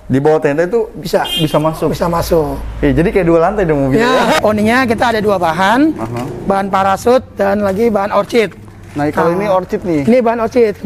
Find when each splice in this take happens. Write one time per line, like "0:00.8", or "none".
0:04.4